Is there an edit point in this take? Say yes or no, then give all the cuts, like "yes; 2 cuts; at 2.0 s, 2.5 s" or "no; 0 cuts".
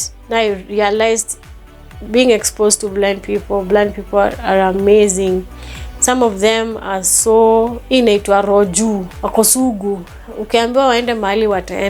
yes; 2 cuts; at 7.8 s, 9.2 s